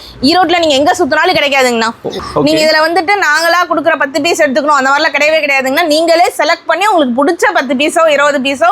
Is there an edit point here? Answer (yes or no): yes